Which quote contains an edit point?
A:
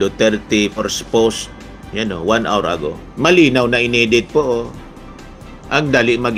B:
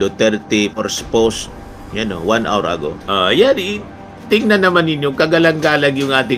B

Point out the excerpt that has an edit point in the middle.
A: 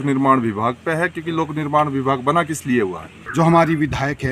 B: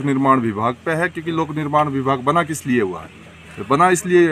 A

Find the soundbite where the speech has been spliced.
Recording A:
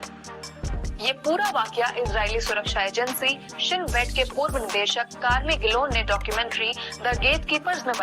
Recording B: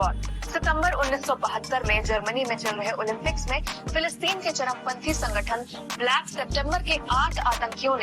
A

